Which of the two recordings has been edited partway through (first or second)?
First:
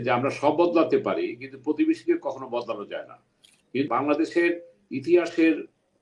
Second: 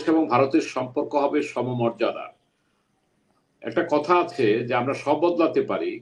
first